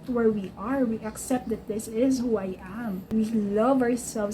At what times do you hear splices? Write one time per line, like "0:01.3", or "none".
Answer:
0:03.1